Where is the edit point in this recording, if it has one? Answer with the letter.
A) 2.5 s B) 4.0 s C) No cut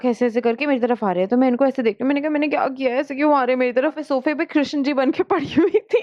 B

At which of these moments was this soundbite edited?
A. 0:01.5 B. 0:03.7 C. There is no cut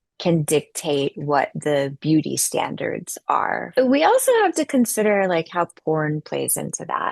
B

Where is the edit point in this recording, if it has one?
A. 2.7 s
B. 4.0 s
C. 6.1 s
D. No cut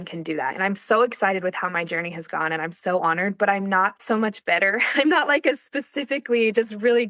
B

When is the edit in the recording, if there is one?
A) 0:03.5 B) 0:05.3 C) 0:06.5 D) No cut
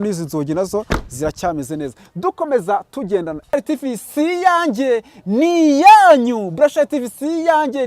A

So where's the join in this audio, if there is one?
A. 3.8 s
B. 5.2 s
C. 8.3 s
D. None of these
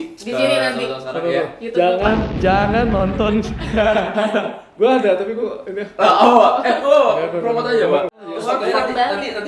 C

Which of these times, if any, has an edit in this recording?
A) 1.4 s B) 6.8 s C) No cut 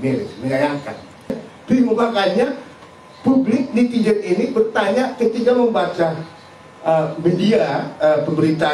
A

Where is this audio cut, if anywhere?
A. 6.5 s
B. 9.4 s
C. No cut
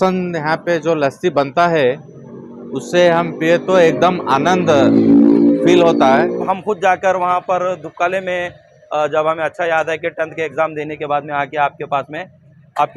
A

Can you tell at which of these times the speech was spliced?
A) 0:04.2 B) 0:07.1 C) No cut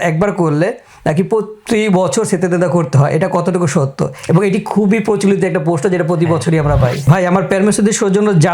B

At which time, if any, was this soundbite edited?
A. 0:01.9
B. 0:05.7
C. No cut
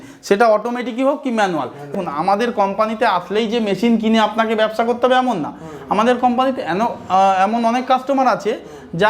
A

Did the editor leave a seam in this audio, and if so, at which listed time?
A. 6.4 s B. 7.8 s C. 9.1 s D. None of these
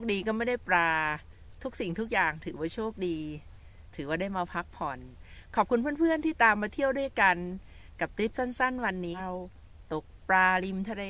D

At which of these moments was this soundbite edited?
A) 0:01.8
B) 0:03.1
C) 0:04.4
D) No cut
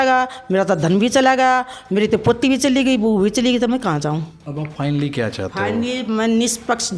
C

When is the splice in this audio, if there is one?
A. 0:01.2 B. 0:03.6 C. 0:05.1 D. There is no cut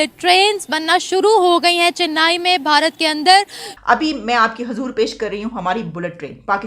B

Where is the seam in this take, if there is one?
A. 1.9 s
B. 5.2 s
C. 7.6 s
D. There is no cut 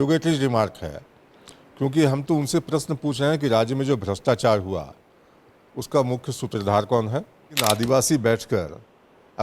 C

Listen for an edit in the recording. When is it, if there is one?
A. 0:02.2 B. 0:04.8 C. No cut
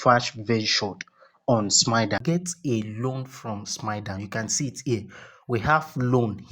A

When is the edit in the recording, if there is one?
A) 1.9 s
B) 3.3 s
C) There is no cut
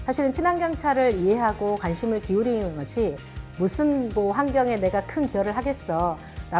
C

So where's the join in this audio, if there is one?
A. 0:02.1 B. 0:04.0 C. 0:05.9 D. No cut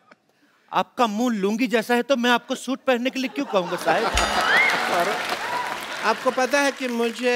C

